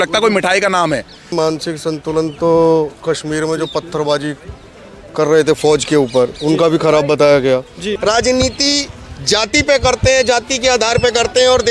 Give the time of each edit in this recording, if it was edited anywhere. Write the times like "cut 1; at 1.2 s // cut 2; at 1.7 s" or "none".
cut 1; at 1.3 s // cut 2; at 7.9 s